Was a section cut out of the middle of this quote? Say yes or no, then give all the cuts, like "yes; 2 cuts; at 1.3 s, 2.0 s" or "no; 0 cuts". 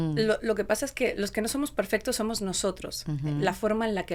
no; 0 cuts